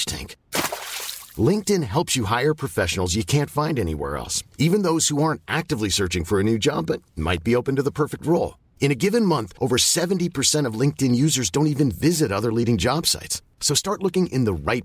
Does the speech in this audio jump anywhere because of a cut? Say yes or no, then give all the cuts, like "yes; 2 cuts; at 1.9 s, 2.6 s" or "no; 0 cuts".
no; 0 cuts